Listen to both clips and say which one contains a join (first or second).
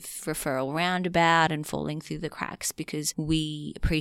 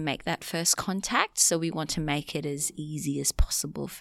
first